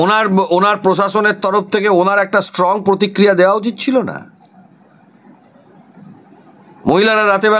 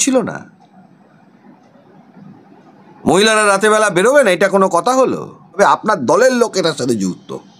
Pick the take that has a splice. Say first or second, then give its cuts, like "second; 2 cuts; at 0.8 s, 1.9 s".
second; 1 cut; at 5.6 s